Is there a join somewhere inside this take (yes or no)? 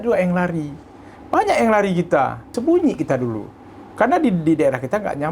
yes